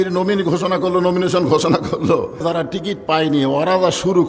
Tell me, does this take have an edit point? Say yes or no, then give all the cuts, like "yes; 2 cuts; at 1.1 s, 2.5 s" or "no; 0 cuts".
yes; 1 cut; at 2.4 s